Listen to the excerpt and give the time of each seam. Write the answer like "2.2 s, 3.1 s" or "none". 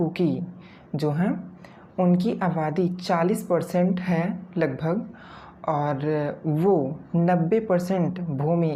none